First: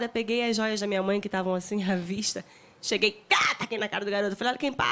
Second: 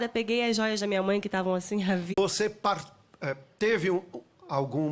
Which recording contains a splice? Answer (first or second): first